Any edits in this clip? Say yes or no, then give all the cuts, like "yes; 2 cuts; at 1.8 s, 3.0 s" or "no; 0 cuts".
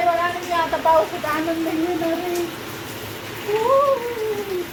no; 0 cuts